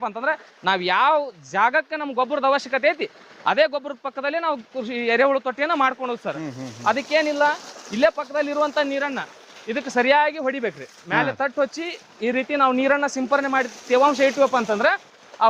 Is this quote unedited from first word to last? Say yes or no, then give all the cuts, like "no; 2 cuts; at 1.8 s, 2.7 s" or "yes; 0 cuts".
yes; 0 cuts